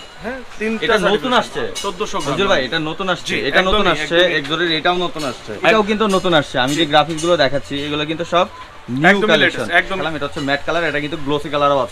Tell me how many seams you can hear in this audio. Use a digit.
2